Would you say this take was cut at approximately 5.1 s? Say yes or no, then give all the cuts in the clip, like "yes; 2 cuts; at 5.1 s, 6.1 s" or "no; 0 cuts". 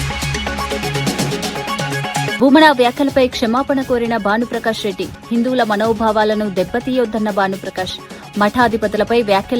no; 2 cuts; at 0.9 s, 2.3 s